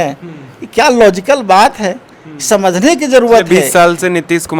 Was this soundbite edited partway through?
yes; 1 cut; at 3.5 s

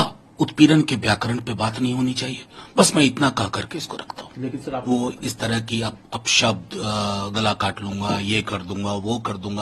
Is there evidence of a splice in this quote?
yes; 1 cut; at 4.8 s

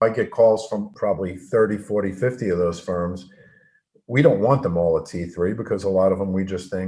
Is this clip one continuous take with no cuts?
no; 1 cut; at 0.9 s

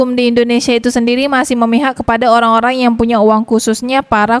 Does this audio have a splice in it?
no; 0 cuts

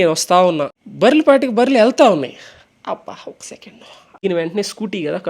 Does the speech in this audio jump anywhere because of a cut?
yes; 1 cut; at 4.1 s

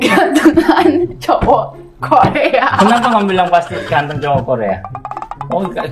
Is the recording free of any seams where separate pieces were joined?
yes; 0 cuts

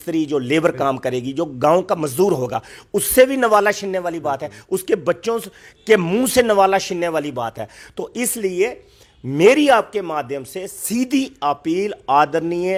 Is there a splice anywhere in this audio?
no; 0 cuts

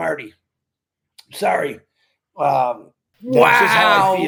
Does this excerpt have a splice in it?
no; 0 cuts

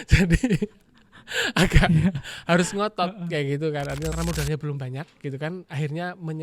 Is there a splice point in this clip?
yes; 1 cut; at 4.1 s

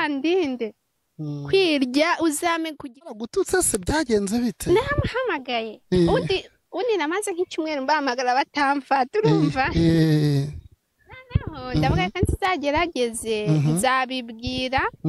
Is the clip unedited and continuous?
no; 1 cut; at 3.1 s

